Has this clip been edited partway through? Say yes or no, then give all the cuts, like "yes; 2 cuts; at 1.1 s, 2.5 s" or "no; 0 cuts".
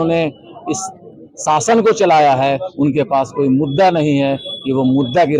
no; 0 cuts